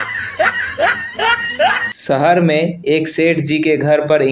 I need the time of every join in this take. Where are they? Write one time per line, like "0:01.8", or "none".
0:01.4